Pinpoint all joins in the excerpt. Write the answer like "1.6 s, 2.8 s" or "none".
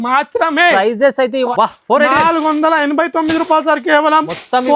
1.5 s